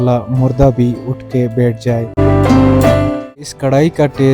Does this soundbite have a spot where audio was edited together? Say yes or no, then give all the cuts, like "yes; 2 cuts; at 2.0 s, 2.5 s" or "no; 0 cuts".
yes; 1 cut; at 3.4 s